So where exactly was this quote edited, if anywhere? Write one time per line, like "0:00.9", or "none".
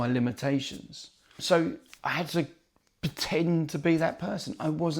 0:01.4